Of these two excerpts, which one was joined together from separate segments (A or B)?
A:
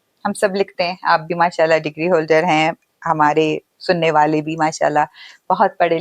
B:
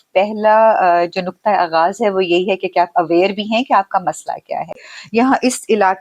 B